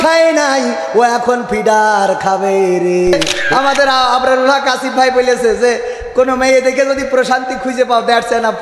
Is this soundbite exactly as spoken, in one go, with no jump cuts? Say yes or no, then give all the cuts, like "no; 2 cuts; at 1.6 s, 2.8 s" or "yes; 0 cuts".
no; 1 cut; at 3.4 s